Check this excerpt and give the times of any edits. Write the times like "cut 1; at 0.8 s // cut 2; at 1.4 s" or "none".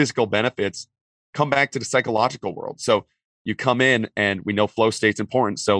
none